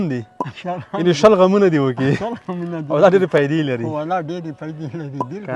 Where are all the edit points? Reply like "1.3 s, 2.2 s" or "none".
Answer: none